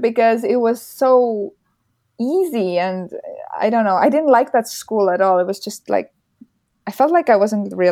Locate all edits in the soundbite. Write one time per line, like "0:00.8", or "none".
none